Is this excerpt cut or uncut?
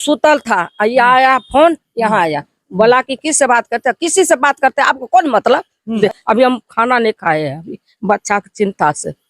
cut